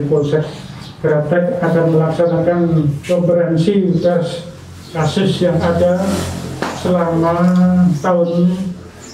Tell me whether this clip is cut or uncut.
uncut